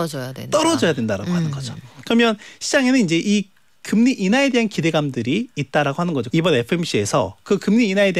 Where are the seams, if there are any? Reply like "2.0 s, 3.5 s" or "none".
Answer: 6.3 s